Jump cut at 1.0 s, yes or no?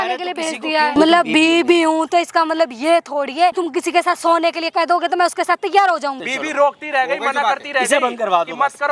yes